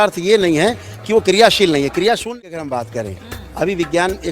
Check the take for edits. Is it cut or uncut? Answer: cut